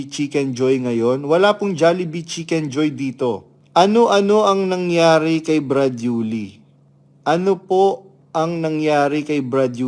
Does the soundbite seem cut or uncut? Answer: uncut